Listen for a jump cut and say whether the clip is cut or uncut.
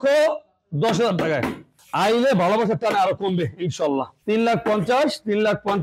cut